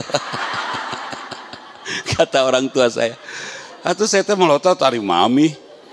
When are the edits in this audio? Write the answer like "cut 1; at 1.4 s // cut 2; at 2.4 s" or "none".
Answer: none